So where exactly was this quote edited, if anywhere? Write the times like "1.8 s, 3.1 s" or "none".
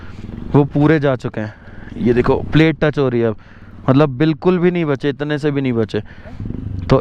none